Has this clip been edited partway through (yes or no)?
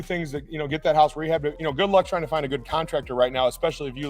yes